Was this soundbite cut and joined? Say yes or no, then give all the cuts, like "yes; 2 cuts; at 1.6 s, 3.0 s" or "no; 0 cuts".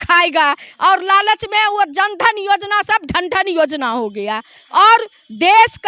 no; 0 cuts